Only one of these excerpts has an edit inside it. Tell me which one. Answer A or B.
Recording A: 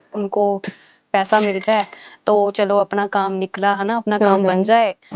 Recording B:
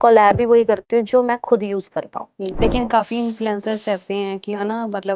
B